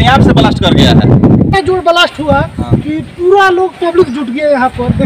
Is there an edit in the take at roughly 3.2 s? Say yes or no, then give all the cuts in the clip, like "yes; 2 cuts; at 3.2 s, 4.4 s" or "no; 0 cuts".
no; 1 cut; at 1.5 s